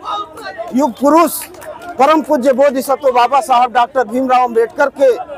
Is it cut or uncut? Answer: uncut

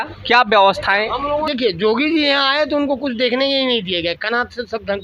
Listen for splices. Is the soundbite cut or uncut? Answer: cut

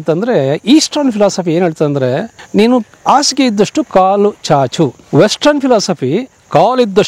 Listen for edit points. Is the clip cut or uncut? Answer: cut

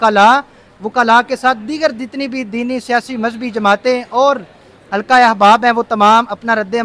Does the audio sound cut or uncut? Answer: uncut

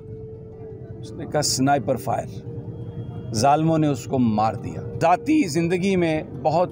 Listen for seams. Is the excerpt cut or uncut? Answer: cut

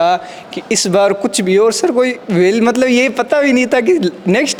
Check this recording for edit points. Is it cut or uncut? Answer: uncut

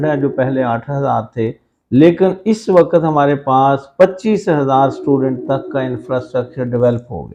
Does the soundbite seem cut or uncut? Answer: uncut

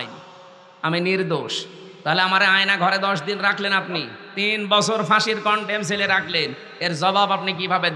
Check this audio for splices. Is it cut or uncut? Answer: uncut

